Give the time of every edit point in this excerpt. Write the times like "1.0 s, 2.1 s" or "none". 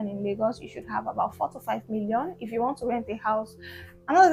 none